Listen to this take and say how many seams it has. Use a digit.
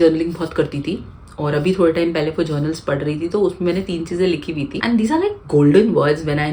0